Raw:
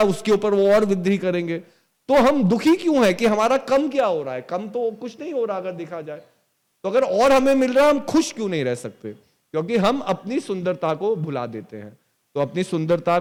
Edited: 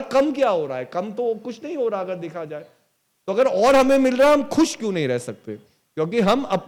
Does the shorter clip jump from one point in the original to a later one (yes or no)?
no